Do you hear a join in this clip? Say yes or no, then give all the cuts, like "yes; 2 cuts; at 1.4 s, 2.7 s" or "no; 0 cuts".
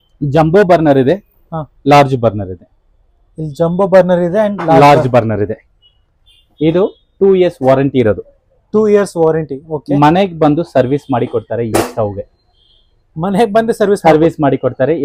no; 0 cuts